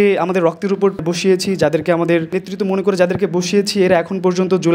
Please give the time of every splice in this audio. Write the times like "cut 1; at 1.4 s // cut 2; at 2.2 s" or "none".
cut 1; at 1.0 s // cut 2; at 2.4 s

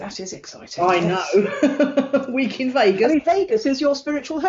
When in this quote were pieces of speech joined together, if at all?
none

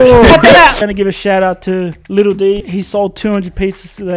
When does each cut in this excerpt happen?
cut 1; at 0.8 s // cut 2; at 2.0 s // cut 3; at 2.7 s

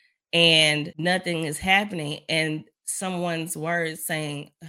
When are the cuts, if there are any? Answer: cut 1; at 0.9 s

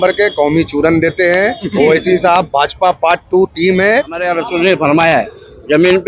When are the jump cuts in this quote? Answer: cut 1; at 4.2 s

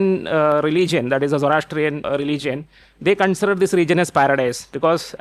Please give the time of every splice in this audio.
cut 1; at 2.1 s

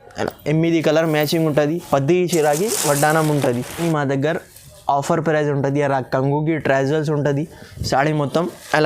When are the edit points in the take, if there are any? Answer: cut 1; at 3.8 s

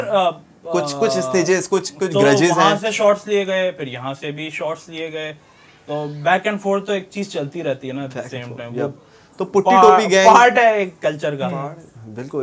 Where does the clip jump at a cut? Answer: none

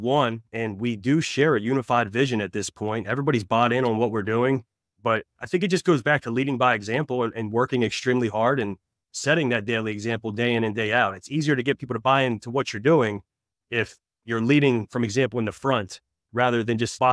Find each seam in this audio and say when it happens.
none

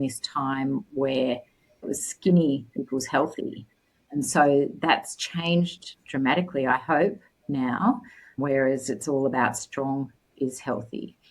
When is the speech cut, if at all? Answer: cut 1; at 1.9 s

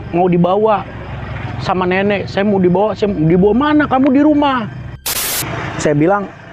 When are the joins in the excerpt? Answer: cut 1; at 5.2 s

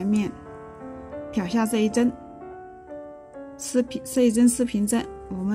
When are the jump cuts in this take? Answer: none

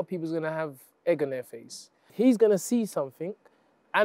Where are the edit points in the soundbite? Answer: cut 1; at 2.1 s

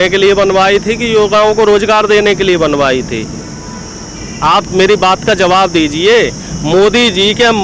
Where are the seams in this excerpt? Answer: none

